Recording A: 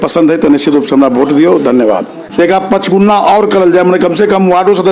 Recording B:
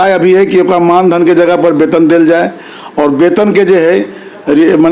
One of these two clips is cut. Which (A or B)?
A